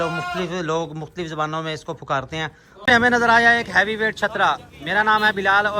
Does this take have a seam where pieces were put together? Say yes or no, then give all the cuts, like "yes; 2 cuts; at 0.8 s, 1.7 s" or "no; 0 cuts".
yes; 1 cut; at 2.7 s